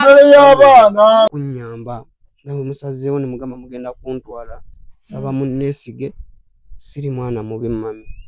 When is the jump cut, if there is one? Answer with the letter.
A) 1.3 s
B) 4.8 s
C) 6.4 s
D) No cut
A